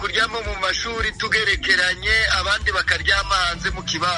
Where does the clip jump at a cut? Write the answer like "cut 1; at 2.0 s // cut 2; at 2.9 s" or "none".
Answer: none